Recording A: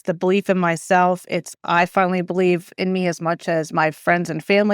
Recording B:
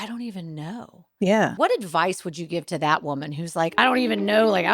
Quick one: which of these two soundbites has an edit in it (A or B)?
B